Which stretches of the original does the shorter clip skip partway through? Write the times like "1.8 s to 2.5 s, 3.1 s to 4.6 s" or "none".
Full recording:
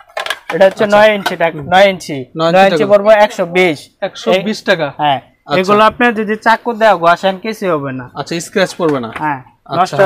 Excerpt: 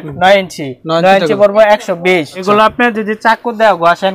3.9 s to 5.6 s